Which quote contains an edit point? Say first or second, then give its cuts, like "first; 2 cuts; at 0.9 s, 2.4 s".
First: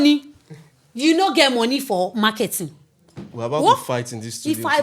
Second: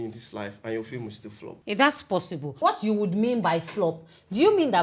second; 2 cuts; at 1.5 s, 2.6 s